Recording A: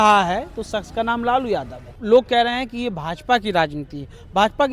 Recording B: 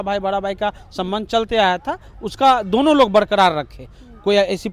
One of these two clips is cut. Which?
A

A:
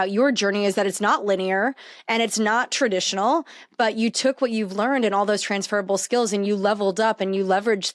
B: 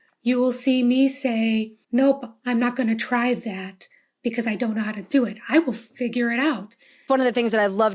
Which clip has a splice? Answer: B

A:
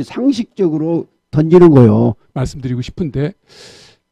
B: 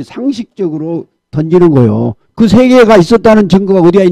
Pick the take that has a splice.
A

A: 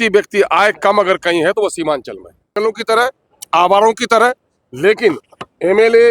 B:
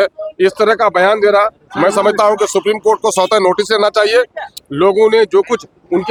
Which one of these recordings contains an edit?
A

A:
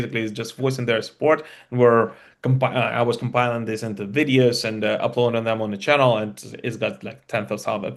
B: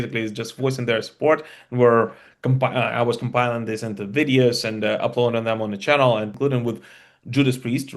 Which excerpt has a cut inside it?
B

